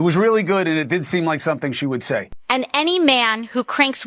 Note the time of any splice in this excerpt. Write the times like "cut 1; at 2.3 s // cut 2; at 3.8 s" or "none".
cut 1; at 2.3 s